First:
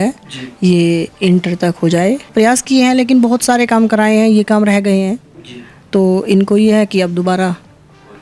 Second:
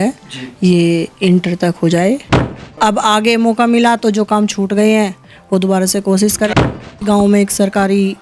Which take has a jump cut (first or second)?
second